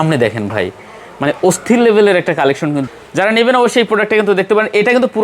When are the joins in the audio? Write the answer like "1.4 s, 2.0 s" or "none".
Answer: 2.8 s

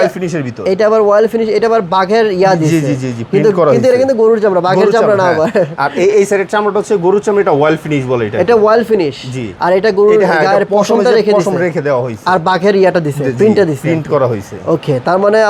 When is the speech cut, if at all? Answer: none

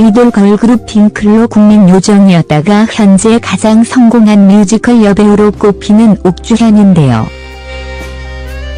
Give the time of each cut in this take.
none

